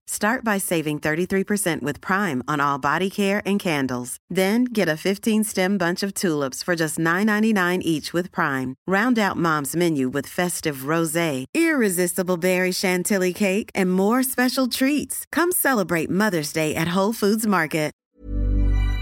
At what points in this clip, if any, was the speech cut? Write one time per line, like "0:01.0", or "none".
0:18.1